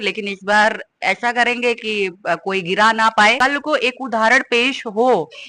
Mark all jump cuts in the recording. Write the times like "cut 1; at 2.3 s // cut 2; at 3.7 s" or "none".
cut 1; at 3.4 s